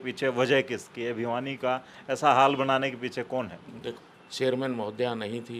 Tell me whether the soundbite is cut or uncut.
cut